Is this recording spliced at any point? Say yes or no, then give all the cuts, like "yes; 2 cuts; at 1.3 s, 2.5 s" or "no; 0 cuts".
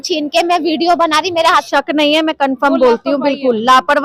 yes; 1 cut; at 1.7 s